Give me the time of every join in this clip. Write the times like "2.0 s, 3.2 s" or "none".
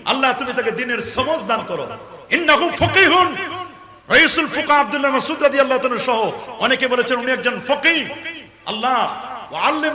none